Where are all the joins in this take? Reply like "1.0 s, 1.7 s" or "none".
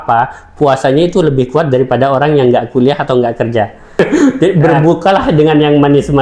3.9 s

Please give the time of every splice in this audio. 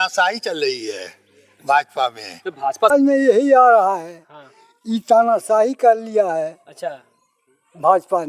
2.9 s

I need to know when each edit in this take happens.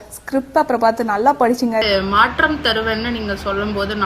1.8 s

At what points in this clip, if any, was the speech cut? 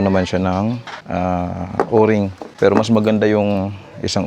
0.9 s, 2.4 s

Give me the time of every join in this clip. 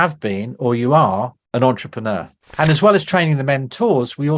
1.4 s, 2.4 s

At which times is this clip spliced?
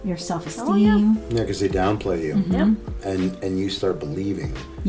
none

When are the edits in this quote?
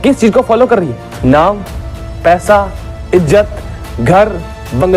1.0 s

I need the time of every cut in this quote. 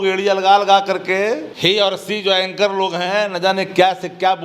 1.5 s

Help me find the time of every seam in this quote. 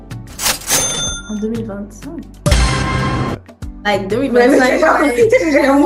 none

